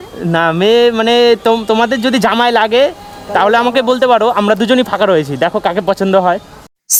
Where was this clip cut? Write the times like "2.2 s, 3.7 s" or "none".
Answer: none